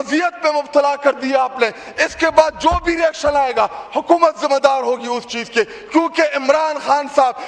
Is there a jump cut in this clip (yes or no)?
no